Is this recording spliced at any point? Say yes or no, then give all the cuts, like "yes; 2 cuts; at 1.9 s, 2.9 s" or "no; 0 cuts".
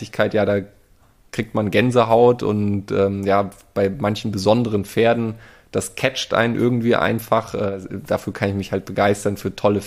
yes; 1 cut; at 7.7 s